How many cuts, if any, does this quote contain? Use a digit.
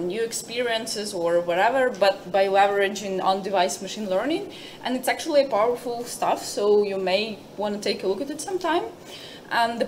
0